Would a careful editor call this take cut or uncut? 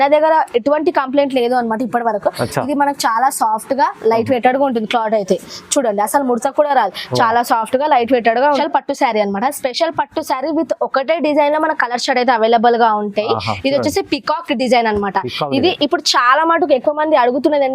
cut